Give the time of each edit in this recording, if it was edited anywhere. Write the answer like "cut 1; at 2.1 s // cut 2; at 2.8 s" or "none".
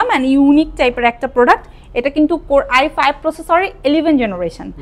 none